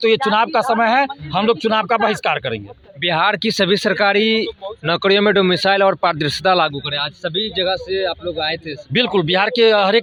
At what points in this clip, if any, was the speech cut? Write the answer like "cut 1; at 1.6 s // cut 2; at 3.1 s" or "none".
none